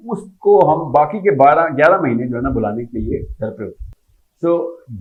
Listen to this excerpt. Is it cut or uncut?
uncut